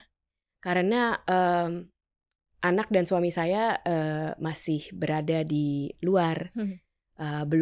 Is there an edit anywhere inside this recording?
no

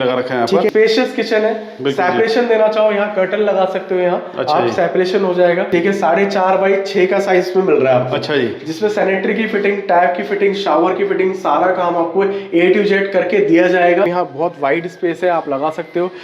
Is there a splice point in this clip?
yes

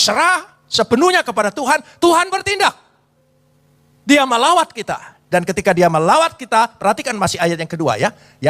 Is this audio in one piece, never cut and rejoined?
yes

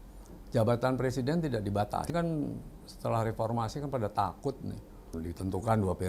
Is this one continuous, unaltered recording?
no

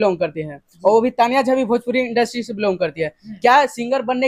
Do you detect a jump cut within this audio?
no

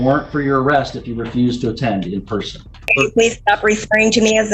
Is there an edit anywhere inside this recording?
yes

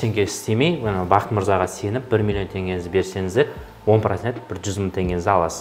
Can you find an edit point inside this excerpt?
no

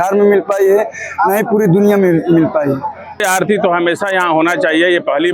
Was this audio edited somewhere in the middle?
yes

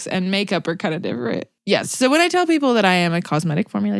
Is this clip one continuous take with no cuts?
no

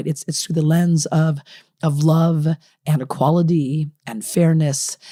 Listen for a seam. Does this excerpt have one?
no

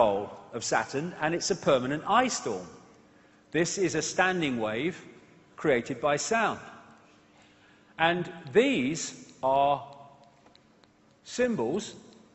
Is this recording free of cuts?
no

